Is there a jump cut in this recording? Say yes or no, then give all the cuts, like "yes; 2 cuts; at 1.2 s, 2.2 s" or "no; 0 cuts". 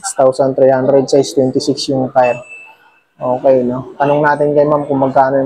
no; 0 cuts